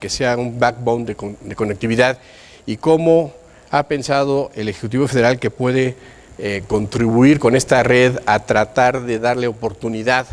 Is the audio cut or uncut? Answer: cut